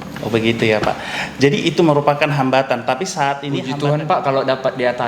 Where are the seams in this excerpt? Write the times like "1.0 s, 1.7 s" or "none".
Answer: 3.7 s